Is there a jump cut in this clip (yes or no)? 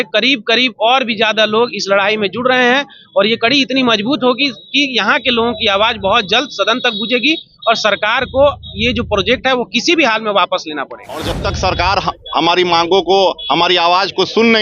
yes